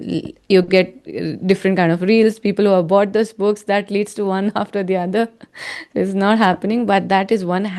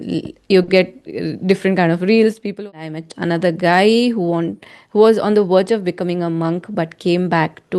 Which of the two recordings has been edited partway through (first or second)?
second